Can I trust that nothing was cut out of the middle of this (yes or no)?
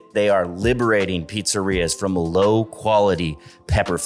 yes